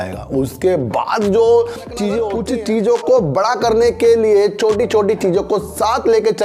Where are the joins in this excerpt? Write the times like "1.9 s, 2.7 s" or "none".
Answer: 2.3 s